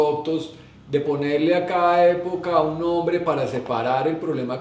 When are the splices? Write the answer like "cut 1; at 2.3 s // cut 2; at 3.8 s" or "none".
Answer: none